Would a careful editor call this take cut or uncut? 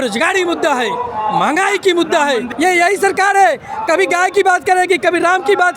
cut